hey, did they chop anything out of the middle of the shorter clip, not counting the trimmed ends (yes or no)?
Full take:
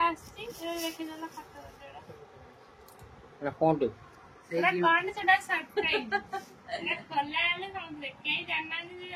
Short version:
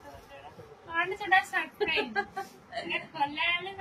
yes